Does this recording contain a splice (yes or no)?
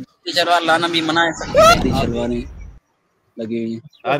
yes